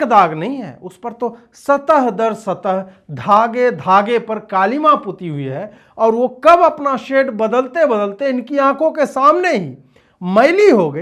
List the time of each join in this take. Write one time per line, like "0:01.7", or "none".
none